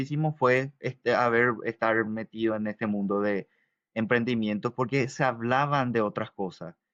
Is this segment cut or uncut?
uncut